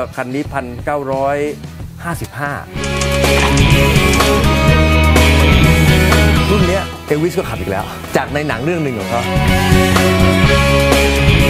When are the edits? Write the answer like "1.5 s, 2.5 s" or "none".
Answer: 2.7 s